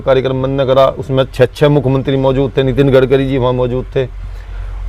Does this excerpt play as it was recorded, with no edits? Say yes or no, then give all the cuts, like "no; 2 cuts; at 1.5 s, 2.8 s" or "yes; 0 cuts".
yes; 0 cuts